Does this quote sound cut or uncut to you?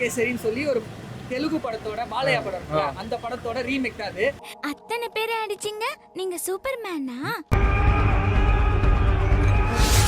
cut